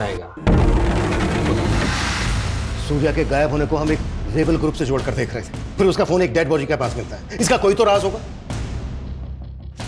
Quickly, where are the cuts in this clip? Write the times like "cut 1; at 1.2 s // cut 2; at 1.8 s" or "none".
cut 1; at 1.9 s